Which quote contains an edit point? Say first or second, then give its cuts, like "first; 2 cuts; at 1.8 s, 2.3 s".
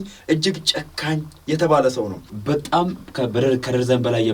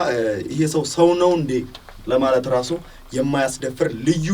first; 1 cut; at 2.4 s